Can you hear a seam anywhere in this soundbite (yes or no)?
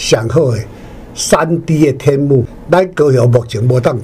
yes